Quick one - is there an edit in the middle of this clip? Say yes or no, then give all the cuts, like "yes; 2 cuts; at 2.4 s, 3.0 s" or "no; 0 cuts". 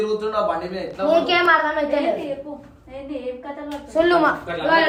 no; 0 cuts